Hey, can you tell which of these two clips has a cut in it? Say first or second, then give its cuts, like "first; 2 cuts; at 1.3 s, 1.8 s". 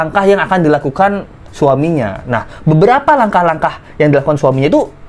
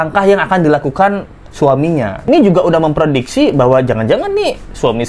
second; 1 cut; at 2.3 s